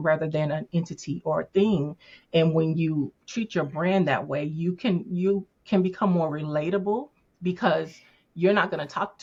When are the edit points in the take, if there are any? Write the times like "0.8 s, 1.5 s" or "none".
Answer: none